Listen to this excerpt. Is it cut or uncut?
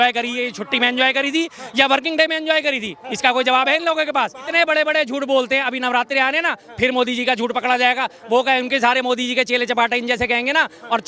cut